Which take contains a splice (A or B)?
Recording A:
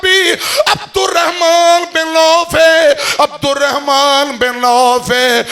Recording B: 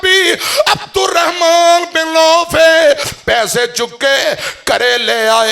B